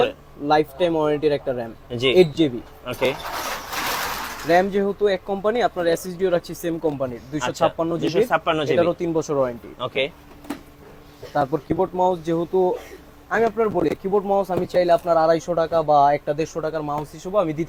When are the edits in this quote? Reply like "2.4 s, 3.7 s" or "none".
none